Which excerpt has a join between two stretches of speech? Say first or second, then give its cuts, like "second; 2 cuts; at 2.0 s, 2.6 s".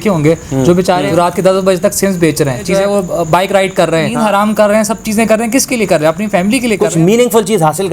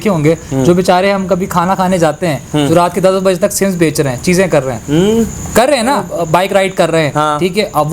first; 4 cuts; at 1.1 s, 2.8 s, 4.2 s, 7.1 s